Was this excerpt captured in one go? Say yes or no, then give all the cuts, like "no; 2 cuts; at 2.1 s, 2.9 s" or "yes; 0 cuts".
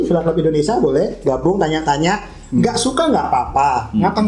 yes; 0 cuts